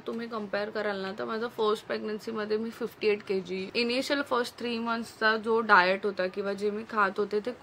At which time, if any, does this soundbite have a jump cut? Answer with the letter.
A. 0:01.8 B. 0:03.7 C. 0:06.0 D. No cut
B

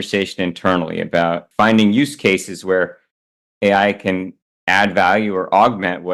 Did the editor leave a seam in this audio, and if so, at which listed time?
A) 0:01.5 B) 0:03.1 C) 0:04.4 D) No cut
A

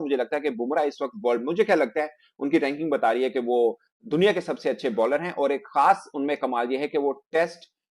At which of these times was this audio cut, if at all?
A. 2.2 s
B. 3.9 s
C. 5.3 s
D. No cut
D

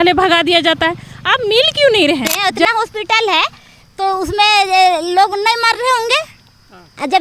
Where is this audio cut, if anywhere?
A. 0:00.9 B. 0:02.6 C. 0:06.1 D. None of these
B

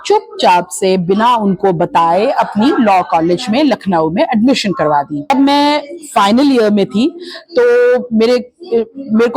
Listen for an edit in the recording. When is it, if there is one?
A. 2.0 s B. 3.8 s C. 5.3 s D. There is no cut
C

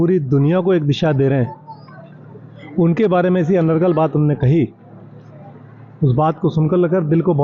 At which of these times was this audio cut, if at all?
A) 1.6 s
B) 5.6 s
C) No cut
C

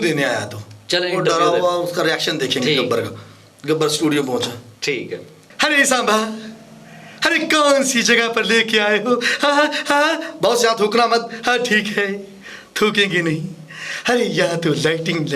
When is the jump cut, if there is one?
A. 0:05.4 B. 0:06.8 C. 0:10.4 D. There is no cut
A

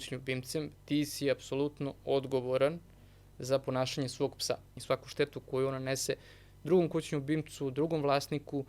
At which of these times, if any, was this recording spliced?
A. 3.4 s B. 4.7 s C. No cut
B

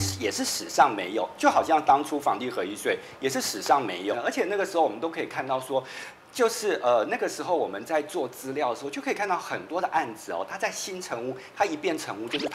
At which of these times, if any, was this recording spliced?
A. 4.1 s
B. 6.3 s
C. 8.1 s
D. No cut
A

